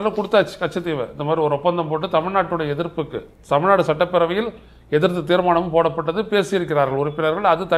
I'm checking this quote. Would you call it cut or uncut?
uncut